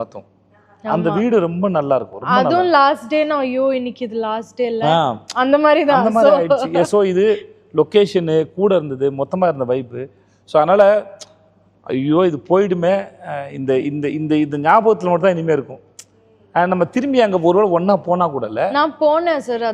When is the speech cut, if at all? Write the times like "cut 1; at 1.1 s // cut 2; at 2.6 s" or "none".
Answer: none